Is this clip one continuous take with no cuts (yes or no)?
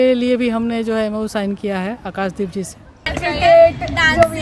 no